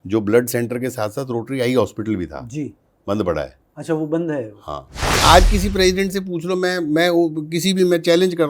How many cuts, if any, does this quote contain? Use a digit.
1